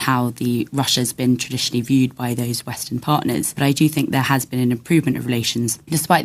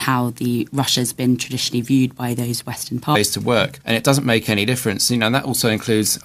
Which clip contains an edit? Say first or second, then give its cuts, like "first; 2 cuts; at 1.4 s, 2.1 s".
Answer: first; 1 cut; at 3.2 s